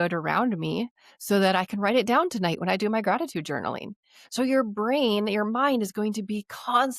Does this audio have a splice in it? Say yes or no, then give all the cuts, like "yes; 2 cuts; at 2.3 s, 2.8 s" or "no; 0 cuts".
no; 0 cuts